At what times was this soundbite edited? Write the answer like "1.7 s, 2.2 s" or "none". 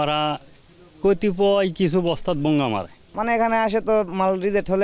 none